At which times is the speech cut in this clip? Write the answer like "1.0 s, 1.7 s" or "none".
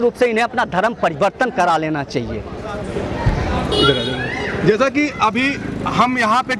none